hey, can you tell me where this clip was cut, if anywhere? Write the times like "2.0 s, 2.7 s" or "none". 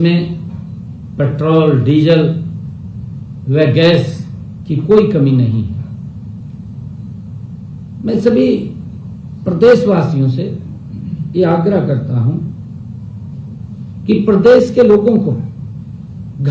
none